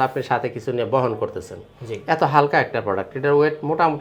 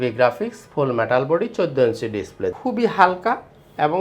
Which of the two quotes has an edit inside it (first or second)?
second